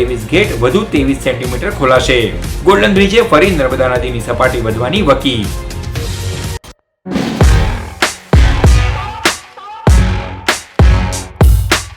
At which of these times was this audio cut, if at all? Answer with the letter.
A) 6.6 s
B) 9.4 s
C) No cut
A